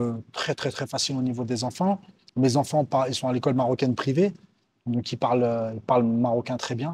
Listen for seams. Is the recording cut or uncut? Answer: uncut